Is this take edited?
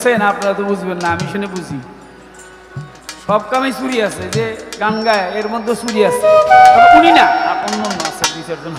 no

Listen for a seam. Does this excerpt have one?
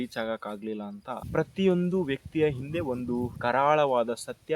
yes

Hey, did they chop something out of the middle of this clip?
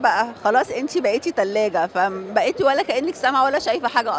no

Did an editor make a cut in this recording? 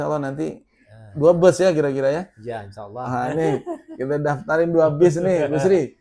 no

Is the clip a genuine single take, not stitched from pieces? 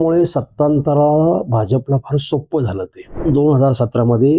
no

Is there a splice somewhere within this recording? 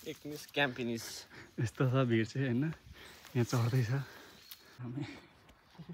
yes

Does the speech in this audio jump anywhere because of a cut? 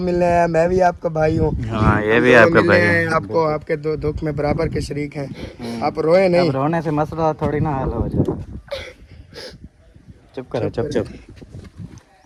no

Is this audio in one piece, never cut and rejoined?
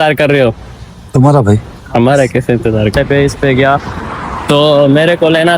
no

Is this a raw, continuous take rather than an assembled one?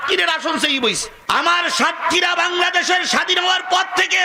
no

